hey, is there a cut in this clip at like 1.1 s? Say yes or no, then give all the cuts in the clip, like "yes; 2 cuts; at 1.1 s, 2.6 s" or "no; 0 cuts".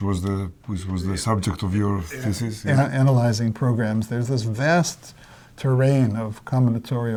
no; 0 cuts